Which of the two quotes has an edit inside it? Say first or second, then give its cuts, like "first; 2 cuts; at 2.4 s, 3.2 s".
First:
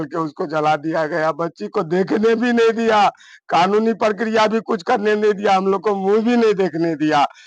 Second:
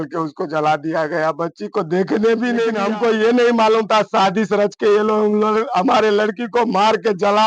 second; 1 cut; at 2.8 s